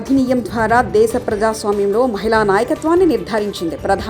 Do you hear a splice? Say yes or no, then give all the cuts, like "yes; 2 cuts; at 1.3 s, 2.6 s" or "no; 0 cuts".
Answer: no; 0 cuts